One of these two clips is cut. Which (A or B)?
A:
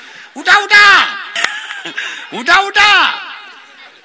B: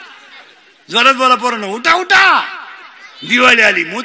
A